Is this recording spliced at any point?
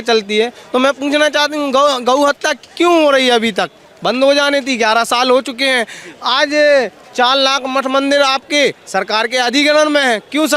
no; 0 cuts

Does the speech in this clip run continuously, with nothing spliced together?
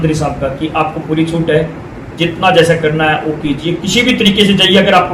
yes; 0 cuts

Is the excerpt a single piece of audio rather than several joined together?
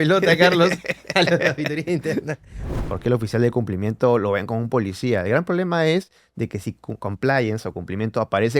no; 1 cut; at 2.7 s

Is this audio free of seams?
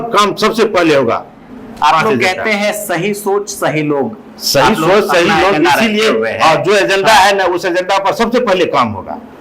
yes; 0 cuts

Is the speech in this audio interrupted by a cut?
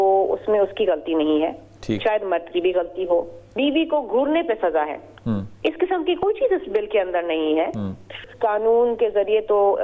yes; 2 cuts; at 3.4 s, 8.2 s

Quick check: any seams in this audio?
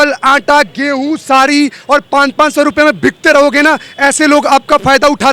no; 0 cuts

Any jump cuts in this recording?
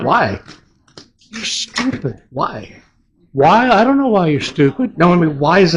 no; 0 cuts

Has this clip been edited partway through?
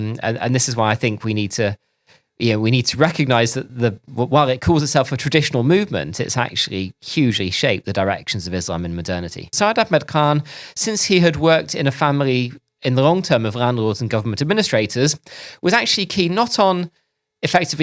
yes; 1 cut; at 9.5 s

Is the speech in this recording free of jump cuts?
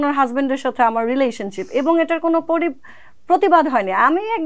yes; 0 cuts

